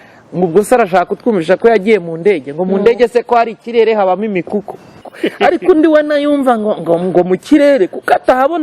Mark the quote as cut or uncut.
cut